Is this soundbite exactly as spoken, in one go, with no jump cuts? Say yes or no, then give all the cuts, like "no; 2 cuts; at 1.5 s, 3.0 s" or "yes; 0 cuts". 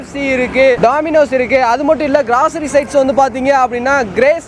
yes; 0 cuts